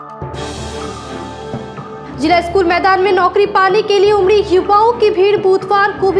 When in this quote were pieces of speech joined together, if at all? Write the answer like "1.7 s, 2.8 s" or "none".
1.6 s